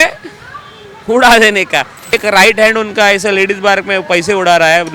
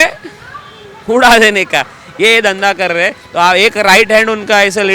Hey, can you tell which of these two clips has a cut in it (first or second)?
first